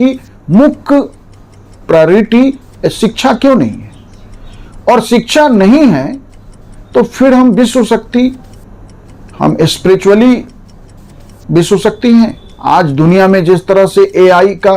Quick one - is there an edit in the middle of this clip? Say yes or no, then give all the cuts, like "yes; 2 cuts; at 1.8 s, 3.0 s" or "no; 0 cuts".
yes; 1 cut; at 12.5 s